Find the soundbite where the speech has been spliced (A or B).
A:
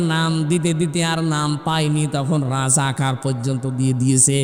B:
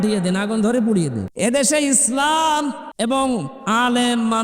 B